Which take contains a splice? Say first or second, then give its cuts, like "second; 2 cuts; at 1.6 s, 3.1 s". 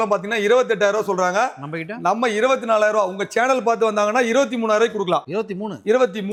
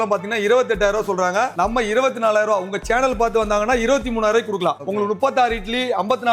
second; 2 cuts; at 1.5 s, 4.8 s